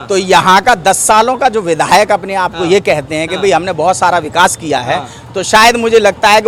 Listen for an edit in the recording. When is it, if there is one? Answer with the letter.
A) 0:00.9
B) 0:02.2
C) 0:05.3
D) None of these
D